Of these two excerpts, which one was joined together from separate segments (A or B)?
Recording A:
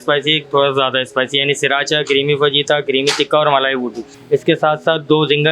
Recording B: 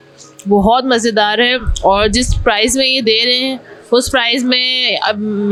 A